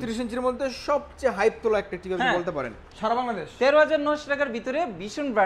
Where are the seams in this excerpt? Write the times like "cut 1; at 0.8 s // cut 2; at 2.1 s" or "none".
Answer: cut 1; at 2.7 s

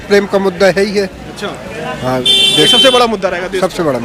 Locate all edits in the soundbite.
none

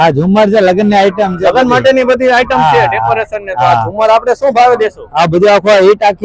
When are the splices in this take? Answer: none

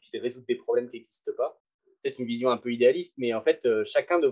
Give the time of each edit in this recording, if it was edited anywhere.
cut 1; at 1.6 s

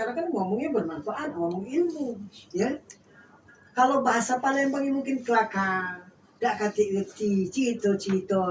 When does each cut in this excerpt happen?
none

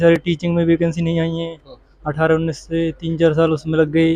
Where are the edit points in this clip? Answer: none

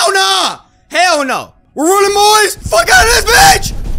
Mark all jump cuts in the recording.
cut 1; at 1.6 s // cut 2; at 2.6 s

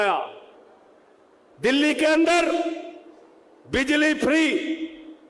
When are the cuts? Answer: none

